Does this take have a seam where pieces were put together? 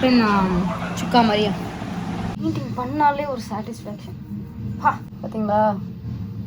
yes; 2 cuts; at 2.3 s, 5.1 s

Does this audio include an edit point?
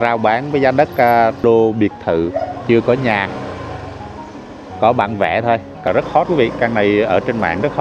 yes; 2 cuts; at 1.4 s, 5.9 s

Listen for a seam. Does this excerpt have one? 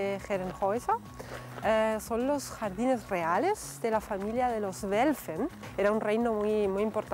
yes; 1 cut; at 5.7 s

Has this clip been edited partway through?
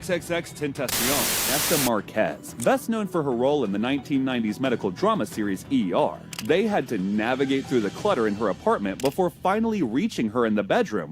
yes; 1 cut; at 1.4 s

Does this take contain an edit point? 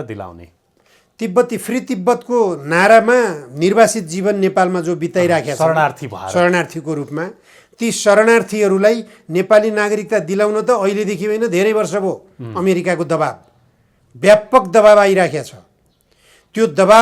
no; 0 cuts

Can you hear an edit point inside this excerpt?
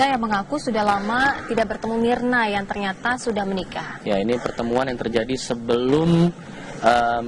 no; 0 cuts

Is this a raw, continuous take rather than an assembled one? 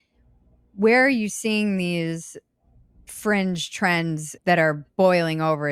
no; 1 cut; at 4.3 s

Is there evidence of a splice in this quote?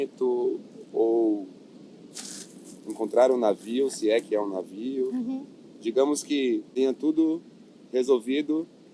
yes; 1 cut; at 6.7 s

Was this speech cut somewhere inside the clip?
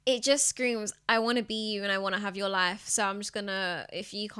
no; 0 cuts

